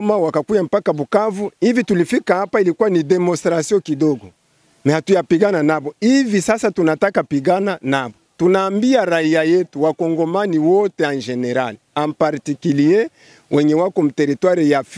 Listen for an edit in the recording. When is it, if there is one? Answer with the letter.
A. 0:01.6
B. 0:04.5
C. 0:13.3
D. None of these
D